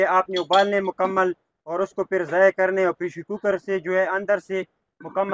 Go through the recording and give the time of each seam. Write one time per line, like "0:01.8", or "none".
none

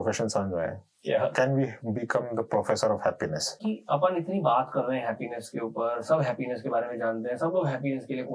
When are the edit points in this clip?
0:03.6

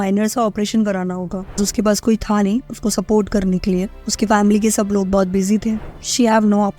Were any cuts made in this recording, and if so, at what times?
0:01.6
0:05.9

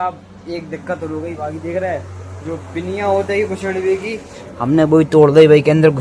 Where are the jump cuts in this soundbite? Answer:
0:01.0

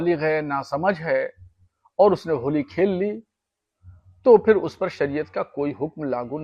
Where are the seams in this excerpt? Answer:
none

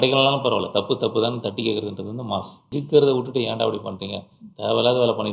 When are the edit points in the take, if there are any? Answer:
0:02.7

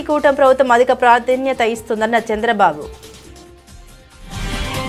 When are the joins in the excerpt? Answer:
0:02.9

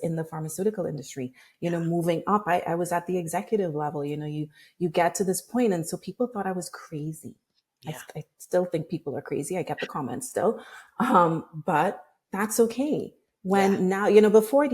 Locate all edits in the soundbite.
0:01.4

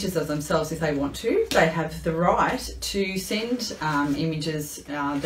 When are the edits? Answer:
none

